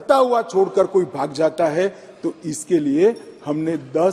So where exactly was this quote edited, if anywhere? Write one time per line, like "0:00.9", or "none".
none